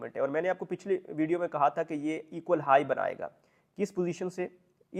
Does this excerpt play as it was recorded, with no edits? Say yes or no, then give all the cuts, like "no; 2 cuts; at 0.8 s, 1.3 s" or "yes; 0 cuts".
yes; 0 cuts